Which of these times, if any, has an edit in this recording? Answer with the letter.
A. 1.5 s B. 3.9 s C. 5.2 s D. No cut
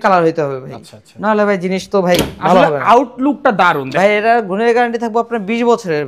B